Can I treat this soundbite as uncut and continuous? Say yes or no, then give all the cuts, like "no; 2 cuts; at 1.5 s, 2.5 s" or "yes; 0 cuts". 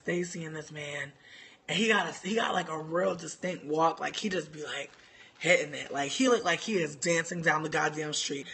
no; 1 cut; at 1.6 s